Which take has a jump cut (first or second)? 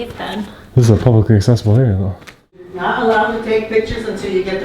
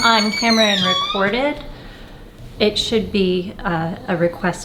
first